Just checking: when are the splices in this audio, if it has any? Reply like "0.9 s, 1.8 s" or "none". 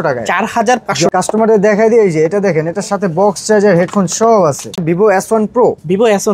1.1 s, 4.8 s